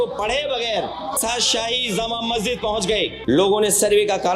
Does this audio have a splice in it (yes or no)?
yes